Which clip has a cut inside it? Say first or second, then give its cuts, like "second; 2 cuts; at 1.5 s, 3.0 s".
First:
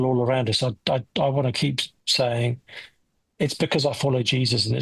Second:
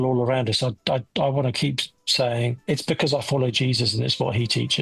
second; 1 cut; at 2.6 s